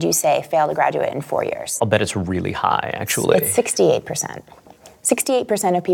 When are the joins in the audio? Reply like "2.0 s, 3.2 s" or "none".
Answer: 1.7 s